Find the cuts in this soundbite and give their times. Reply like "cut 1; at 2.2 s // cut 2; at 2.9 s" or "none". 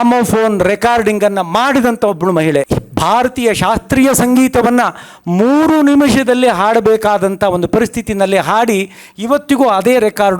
cut 1; at 2.7 s